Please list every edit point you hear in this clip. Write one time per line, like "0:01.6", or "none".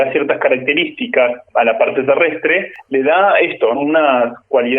0:01.4
0:02.7
0:03.8